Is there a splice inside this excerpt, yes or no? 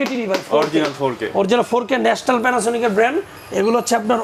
no